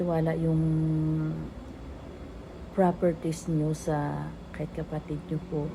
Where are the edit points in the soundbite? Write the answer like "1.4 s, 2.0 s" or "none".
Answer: none